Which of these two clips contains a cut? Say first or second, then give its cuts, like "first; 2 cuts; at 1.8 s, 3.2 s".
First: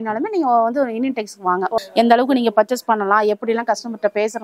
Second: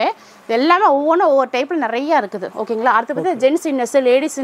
first; 1 cut; at 1.7 s